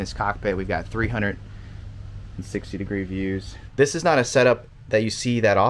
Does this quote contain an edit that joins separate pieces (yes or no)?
yes